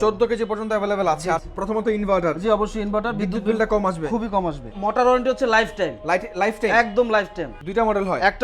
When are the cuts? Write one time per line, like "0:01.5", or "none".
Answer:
0:01.5
0:04.7
0:07.5